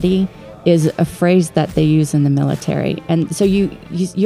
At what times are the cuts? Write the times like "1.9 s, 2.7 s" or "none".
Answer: none